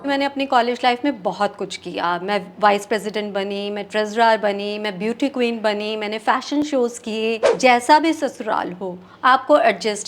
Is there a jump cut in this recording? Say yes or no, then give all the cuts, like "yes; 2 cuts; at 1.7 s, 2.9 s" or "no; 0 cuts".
yes; 1 cut; at 7.5 s